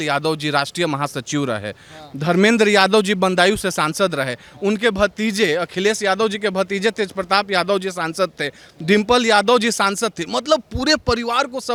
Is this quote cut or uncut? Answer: uncut